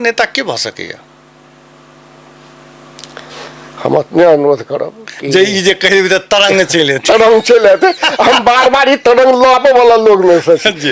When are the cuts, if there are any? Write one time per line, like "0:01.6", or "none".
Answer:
none